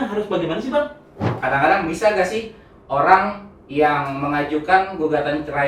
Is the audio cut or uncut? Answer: cut